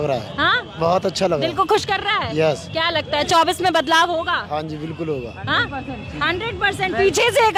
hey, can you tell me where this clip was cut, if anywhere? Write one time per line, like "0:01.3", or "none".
none